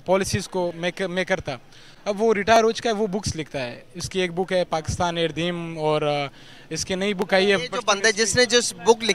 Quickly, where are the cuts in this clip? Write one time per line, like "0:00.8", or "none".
none

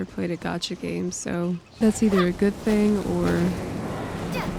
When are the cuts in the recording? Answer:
0:01.7

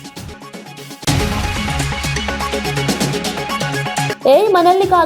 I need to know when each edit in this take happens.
0:01.0
0:04.1

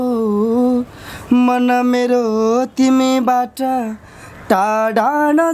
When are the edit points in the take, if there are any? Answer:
none

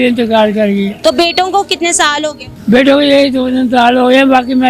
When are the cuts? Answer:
0:00.9
0:02.5

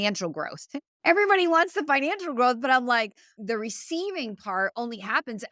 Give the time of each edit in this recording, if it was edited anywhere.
0:03.3

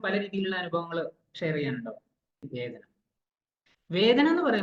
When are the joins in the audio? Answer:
0:02.5

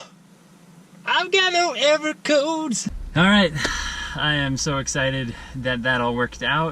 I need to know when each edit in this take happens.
none

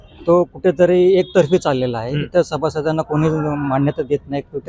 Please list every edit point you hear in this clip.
none

